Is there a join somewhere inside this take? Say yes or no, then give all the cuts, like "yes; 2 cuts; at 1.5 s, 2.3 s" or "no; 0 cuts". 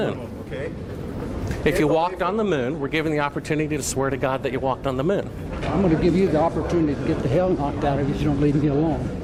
no; 0 cuts